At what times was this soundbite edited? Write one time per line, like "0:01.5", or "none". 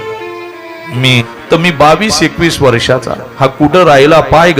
0:01.3